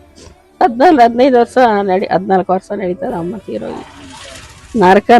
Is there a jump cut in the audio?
no; 0 cuts

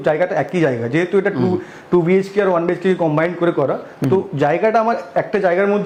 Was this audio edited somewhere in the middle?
no; 0 cuts

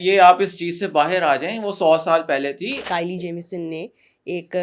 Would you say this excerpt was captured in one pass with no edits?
no; 1 cut; at 2.7 s

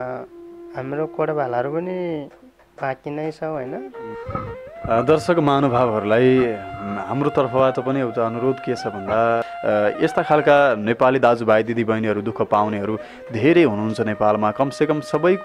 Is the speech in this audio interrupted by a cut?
yes; 2 cuts; at 4.2 s, 9.5 s

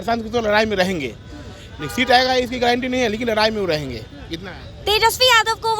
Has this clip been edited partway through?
no; 0 cuts

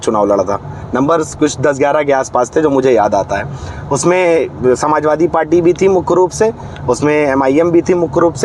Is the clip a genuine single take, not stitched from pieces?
yes; 0 cuts

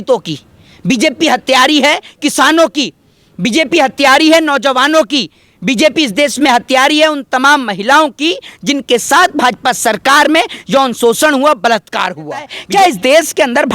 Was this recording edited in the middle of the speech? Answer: yes; 1 cut; at 12.6 s

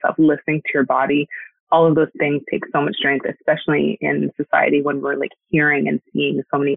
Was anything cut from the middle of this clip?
no; 0 cuts

